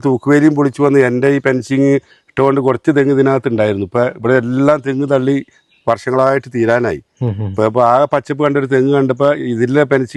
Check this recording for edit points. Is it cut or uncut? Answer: uncut